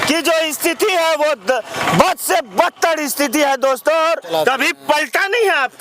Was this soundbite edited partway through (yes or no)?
yes